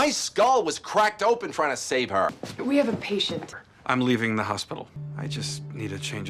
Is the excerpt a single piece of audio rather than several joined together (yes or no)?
yes